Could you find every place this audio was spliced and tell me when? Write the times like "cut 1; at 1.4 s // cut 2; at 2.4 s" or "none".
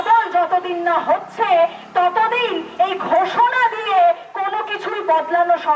none